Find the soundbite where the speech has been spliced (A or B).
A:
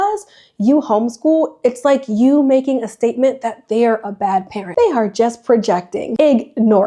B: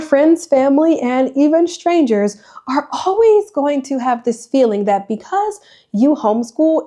A